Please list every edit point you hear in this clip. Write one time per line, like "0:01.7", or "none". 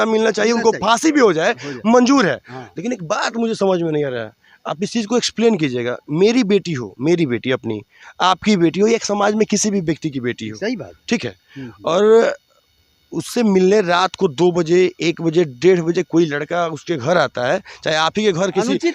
none